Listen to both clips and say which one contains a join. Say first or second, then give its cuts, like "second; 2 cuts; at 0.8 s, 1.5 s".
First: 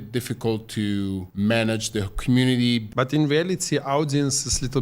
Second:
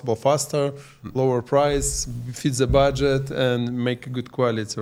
first; 2 cuts; at 1.3 s, 2.9 s